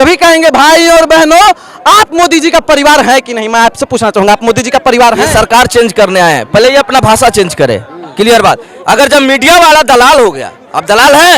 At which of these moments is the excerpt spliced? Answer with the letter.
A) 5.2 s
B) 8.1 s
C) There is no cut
A